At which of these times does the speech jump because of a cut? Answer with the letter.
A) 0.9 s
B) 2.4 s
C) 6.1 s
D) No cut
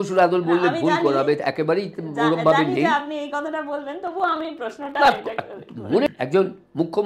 C